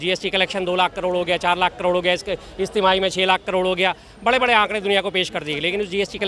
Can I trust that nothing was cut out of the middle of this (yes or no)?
yes